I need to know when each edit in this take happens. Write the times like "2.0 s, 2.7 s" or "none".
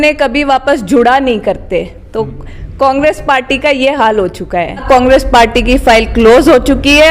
4.8 s